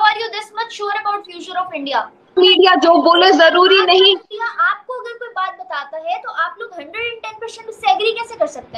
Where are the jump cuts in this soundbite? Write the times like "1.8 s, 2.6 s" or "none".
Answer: 2.3 s